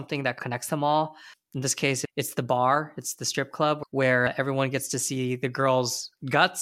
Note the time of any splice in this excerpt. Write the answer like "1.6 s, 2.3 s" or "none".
none